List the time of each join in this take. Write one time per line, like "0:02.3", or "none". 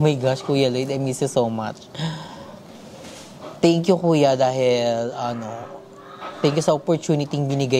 none